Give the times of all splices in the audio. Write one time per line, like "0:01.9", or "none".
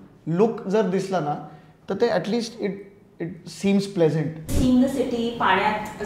0:04.5